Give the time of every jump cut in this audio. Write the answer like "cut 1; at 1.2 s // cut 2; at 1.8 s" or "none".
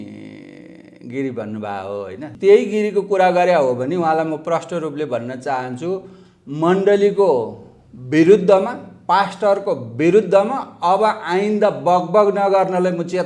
cut 1; at 2.2 s